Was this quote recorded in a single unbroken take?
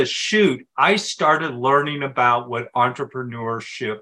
yes; 0 cuts

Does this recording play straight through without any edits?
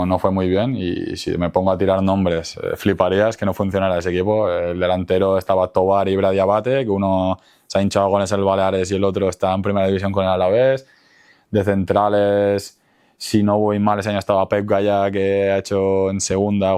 yes; 0 cuts

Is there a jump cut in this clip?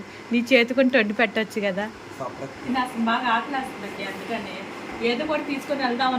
yes; 1 cut; at 2.6 s

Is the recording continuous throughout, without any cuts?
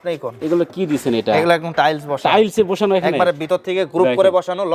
yes; 0 cuts

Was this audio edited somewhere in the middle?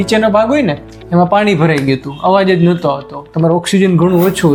no; 0 cuts

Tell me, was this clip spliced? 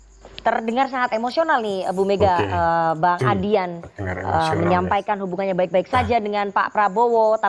no; 0 cuts

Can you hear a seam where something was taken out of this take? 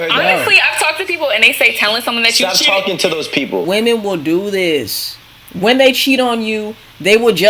yes; 1 cut; at 3.7 s

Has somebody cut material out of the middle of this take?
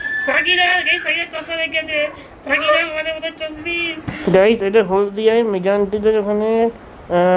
yes; 1 cut; at 4.1 s

